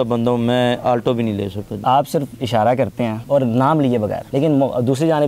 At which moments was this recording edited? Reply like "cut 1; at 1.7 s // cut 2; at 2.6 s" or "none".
cut 1; at 1.7 s